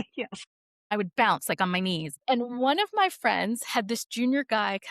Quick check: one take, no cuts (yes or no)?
no